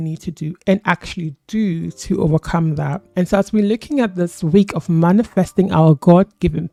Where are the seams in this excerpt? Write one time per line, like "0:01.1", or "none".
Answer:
none